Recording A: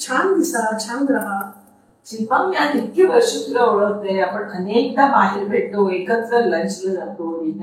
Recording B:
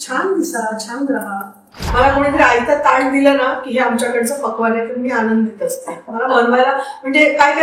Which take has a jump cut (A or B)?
B